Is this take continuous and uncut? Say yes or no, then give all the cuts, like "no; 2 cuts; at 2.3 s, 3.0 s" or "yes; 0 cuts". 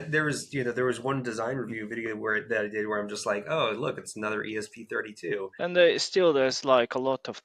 no; 1 cut; at 5.5 s